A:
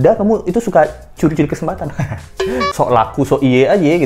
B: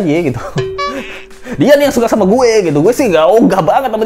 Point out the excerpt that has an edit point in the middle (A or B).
A